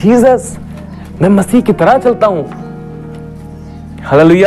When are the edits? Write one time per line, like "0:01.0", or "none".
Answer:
none